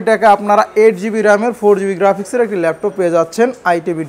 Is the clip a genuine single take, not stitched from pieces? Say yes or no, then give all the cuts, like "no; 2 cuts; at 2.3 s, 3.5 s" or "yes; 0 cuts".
yes; 0 cuts